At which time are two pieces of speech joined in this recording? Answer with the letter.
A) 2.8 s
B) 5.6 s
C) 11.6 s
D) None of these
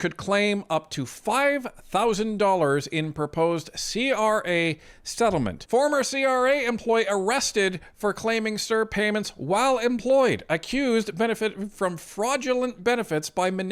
B